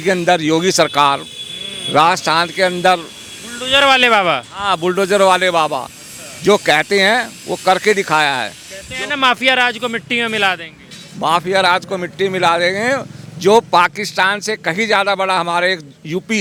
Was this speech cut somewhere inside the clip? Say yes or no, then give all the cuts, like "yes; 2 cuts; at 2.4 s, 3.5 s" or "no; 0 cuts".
no; 0 cuts